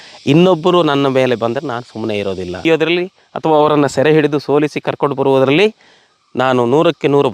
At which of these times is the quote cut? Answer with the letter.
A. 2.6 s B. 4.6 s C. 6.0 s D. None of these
A